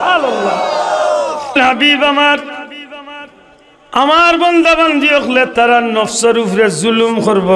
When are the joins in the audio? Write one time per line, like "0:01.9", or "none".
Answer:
0:01.6